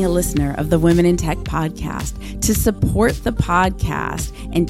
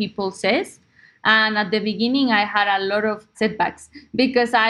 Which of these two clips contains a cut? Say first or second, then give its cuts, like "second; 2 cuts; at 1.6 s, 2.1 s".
second; 1 cut; at 3.3 s